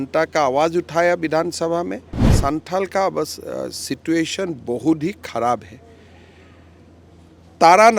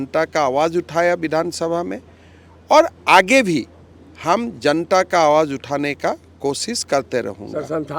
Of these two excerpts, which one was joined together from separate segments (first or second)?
first